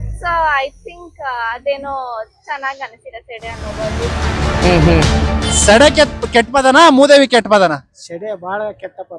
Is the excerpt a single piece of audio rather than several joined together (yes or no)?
no